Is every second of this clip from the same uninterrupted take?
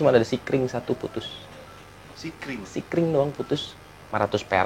yes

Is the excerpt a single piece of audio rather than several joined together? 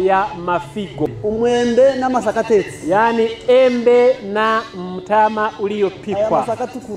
no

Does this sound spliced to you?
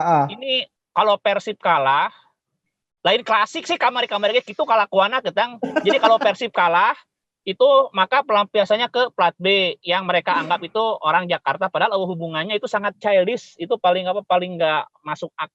no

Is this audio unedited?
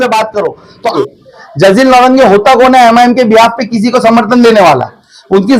no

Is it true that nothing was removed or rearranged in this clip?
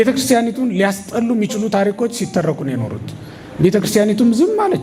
yes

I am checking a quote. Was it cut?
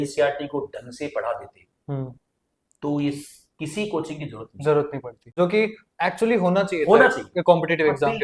yes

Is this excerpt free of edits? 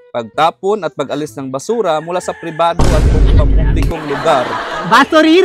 yes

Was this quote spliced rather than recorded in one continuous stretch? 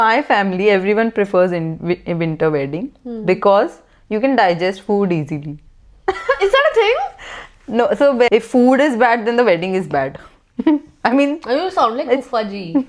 yes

